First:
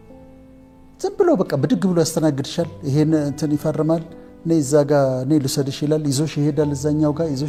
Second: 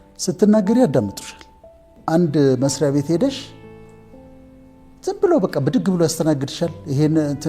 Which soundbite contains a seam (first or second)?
second